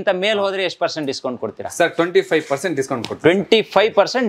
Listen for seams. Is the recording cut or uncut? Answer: uncut